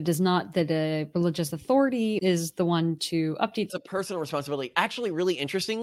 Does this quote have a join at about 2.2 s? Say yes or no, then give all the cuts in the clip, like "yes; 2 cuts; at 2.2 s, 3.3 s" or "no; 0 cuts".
yes; 2 cuts; at 2.2 s, 3.7 s